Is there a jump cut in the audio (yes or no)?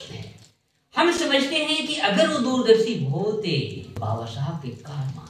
yes